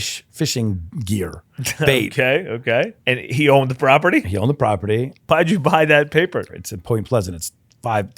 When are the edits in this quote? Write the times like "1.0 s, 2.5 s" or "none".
3.1 s, 5.3 s, 6.5 s